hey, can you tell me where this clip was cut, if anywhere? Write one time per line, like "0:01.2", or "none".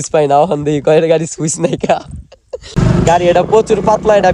0:02.7